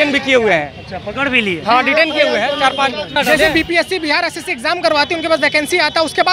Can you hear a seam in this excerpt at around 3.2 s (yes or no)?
yes